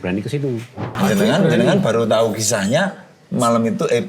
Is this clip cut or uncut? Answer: cut